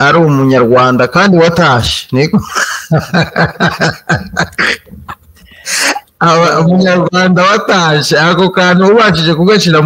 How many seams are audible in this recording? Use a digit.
0